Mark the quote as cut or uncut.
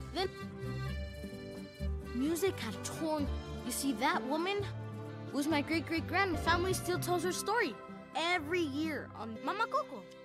uncut